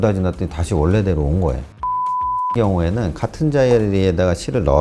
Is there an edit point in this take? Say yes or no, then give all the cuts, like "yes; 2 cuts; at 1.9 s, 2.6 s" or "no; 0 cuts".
no; 0 cuts